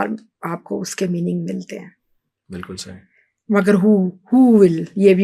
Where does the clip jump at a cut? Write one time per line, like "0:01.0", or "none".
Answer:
none